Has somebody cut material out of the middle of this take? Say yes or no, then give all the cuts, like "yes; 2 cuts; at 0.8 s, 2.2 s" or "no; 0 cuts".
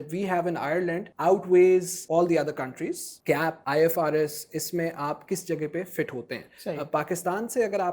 yes; 3 cuts; at 1.1 s, 2.0 s, 3.3 s